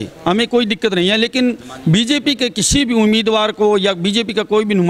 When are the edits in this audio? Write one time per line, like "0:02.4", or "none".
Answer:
none